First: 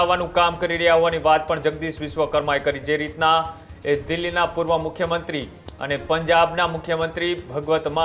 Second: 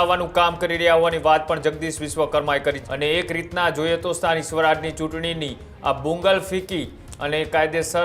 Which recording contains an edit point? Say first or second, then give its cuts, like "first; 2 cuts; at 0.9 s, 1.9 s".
second; 1 cut; at 2.8 s